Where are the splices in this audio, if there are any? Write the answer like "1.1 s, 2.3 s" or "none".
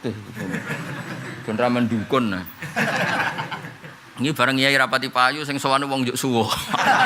none